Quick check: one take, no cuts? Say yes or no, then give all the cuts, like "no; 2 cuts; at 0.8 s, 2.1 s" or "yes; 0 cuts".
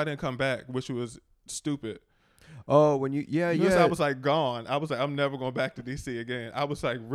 yes; 0 cuts